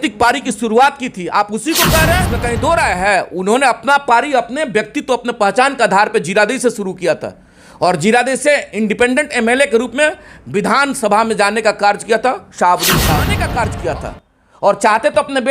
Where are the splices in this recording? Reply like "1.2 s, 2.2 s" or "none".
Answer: 2.3 s, 13.4 s